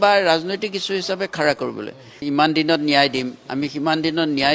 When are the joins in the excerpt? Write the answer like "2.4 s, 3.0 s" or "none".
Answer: 2.2 s